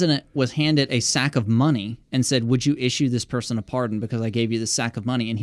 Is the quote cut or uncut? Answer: uncut